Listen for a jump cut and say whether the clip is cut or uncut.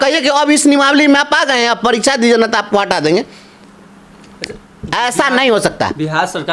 uncut